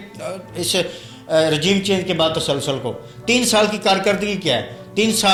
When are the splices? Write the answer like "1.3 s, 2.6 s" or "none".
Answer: none